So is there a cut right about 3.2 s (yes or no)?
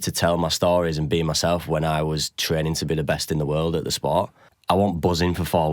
no